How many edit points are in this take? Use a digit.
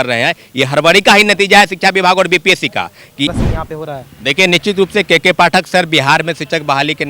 1